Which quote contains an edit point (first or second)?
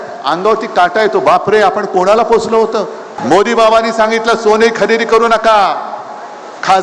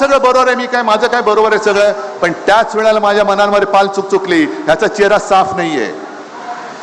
first